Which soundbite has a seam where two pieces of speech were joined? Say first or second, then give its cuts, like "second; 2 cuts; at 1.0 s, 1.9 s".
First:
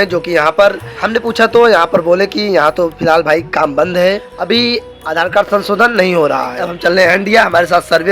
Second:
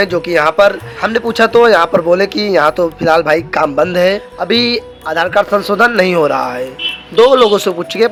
first; 1 cut; at 6.7 s